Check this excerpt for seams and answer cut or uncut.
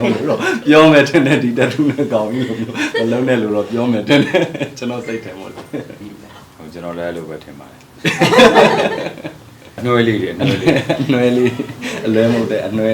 cut